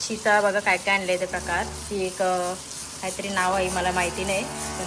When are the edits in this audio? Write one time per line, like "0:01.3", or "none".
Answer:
none